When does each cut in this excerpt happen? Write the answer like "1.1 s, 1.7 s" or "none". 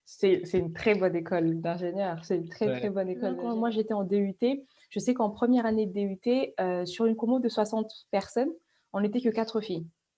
3.4 s